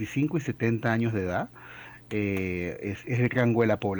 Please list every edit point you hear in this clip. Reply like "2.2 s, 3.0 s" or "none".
none